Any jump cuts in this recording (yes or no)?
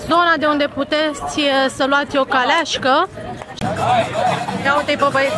yes